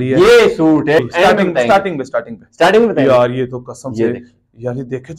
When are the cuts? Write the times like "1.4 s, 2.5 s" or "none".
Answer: 1.0 s